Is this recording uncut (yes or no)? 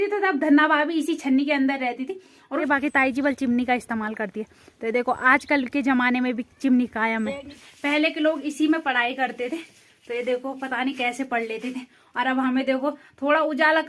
no